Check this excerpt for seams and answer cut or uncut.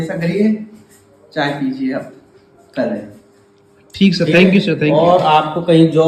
uncut